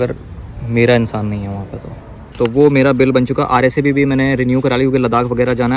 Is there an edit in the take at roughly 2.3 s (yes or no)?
yes